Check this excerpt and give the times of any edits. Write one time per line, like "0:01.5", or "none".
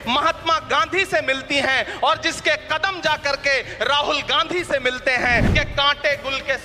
0:05.5